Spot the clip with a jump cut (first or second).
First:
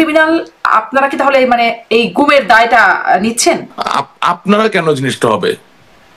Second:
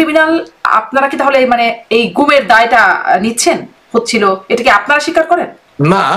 first